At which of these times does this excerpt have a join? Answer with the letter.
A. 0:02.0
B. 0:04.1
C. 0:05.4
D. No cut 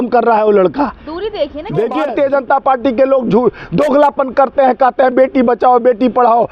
A